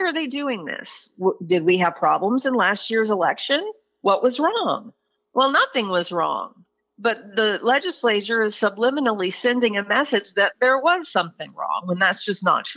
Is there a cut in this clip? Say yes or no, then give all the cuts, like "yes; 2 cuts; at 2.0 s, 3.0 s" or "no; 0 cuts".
no; 0 cuts